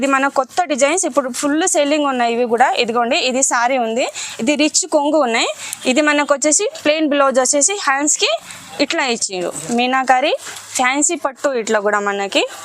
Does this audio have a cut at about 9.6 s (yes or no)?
yes